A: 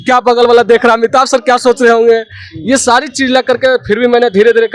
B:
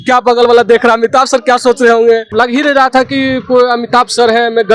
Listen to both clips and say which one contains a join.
B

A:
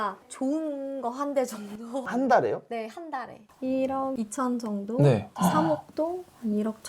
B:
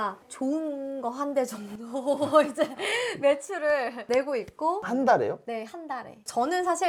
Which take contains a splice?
A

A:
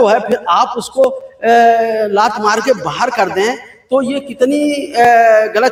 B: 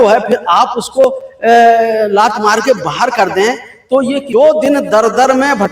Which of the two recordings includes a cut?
B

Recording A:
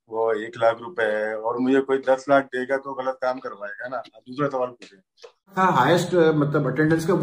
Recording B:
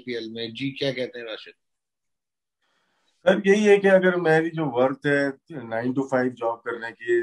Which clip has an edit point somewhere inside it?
A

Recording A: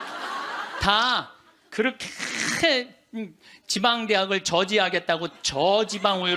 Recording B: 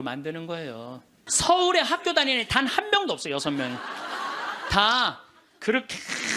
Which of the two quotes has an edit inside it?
B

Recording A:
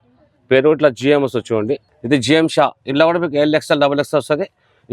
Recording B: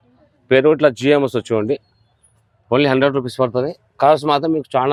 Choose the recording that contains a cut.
A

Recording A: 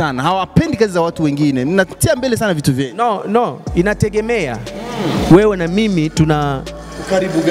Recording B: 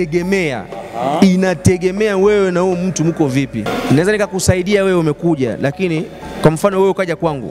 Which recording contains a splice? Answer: B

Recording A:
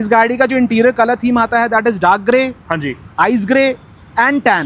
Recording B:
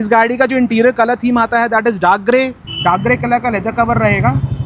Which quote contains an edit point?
B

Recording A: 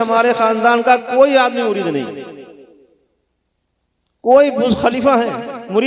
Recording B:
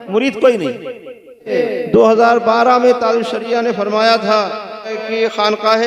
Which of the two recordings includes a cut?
B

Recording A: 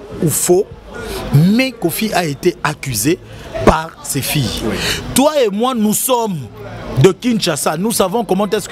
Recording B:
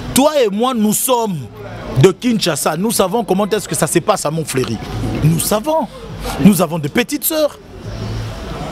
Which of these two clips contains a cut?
B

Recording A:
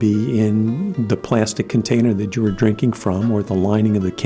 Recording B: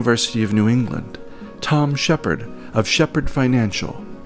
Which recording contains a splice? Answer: A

